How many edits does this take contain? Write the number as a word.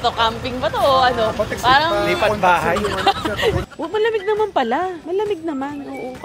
two